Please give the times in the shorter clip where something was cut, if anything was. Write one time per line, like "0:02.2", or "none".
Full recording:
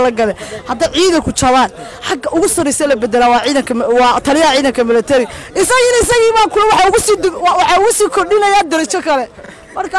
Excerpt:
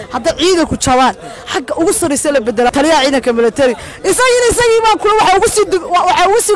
0:02.7